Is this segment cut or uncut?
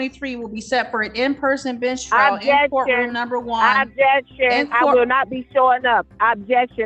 uncut